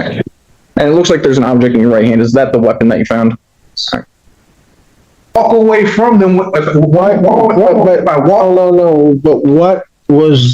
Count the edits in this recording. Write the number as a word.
one